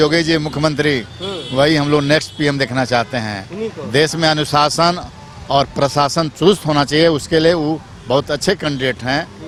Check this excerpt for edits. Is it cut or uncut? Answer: uncut